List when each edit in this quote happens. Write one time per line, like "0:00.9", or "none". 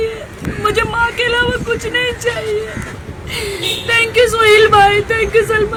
none